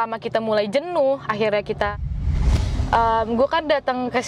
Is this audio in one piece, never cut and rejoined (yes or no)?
no